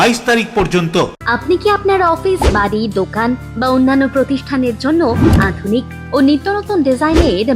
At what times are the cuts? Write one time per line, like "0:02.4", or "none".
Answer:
0:01.2